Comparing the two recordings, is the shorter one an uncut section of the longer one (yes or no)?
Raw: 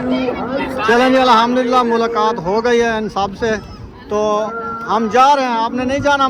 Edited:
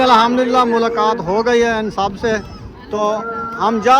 no